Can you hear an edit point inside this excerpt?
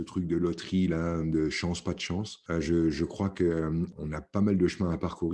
yes; 2 cuts; at 2.4 s, 3.9 s

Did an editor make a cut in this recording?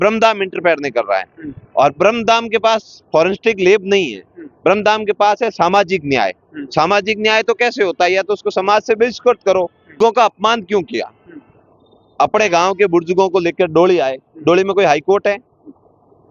yes; 1 cut; at 10.0 s

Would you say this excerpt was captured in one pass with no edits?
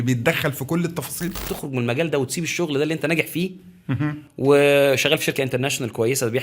no; 1 cut; at 1.5 s

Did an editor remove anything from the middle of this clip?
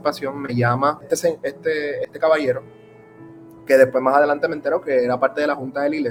no; 0 cuts

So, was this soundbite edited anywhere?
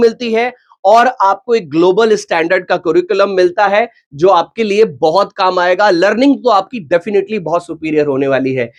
no; 0 cuts

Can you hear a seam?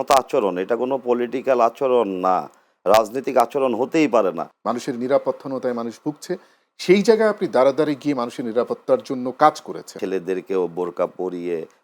yes; 2 cuts; at 4.5 s, 9.9 s

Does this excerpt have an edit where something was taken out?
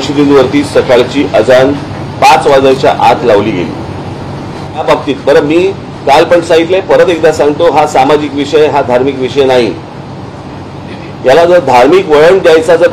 yes; 1 cut; at 4.8 s

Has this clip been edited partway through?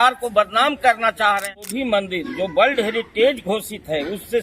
yes; 1 cut; at 1.5 s

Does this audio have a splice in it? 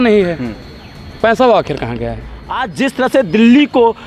yes; 1 cut; at 2.8 s

